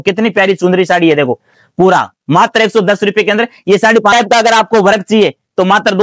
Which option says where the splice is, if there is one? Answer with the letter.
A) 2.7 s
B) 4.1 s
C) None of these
B